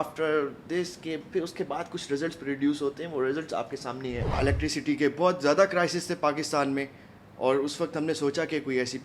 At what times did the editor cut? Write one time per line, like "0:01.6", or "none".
0:04.4